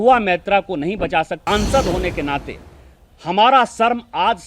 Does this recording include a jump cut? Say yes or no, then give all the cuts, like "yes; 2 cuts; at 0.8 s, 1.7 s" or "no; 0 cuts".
yes; 1 cut; at 1.4 s